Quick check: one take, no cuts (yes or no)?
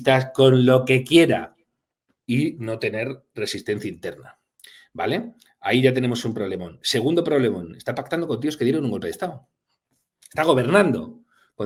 yes